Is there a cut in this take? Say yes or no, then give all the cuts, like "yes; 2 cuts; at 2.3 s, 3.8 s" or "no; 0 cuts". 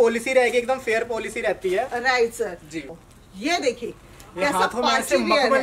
yes; 1 cut; at 2.9 s